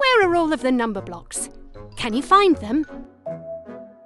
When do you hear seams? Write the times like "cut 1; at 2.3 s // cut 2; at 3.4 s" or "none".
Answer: cut 1; at 2.9 s

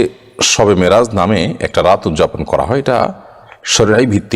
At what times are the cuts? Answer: none

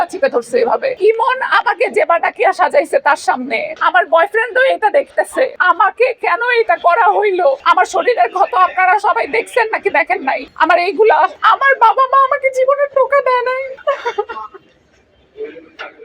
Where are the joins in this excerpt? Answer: cut 1; at 1.0 s // cut 2; at 3.7 s // cut 3; at 5.6 s // cut 4; at 7.6 s // cut 5; at 10.5 s

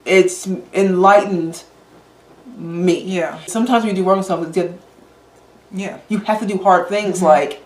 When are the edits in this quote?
cut 1; at 3.4 s

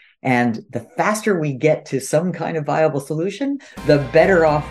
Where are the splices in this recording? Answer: none

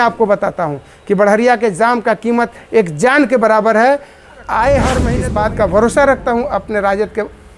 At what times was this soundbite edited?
cut 1; at 5.1 s

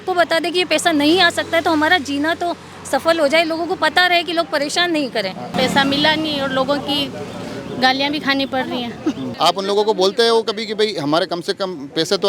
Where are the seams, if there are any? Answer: cut 1; at 5.5 s // cut 2; at 9.3 s

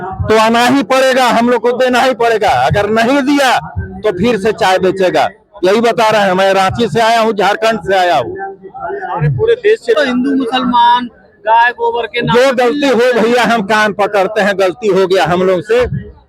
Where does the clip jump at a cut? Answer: cut 1; at 10.0 s

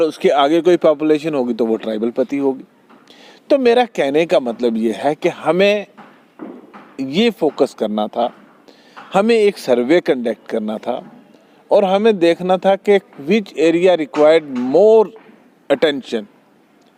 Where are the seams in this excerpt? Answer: none

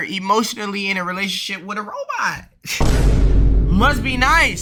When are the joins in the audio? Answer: none

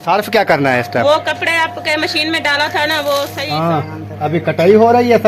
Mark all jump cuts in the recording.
cut 1; at 3.5 s

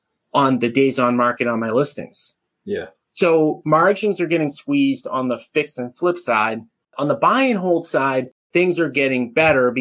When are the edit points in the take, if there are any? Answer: cut 1; at 8.4 s

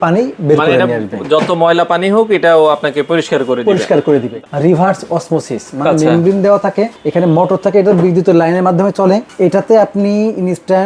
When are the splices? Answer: cut 1; at 4.3 s // cut 2; at 7.0 s // cut 3; at 9.3 s

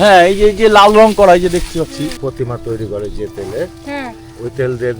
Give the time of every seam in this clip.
cut 1; at 2.2 s

